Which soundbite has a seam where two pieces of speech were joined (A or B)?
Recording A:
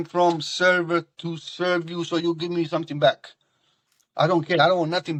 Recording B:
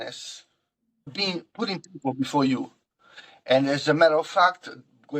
B